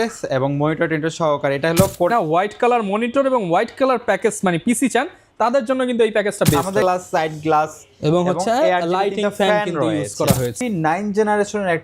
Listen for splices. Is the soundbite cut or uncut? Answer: cut